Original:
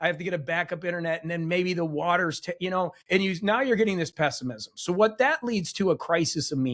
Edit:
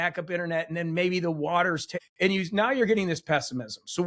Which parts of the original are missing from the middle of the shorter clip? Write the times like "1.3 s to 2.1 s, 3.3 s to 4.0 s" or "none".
2.6 s to 3.0 s